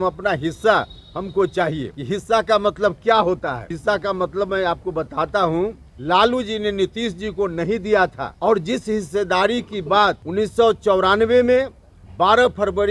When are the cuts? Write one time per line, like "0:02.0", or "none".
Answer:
0:01.9
0:03.7
0:05.9
0:08.3
0:10.2